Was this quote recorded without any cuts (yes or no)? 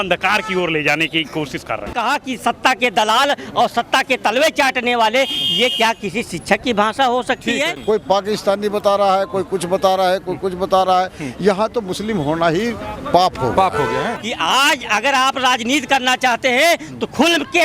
no